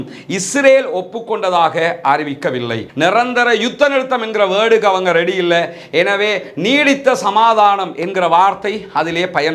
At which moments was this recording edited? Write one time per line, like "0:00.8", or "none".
0:02.8